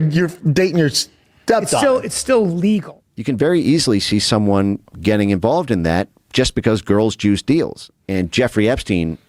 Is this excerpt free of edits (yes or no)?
no